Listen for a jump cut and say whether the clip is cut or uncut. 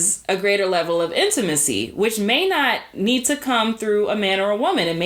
uncut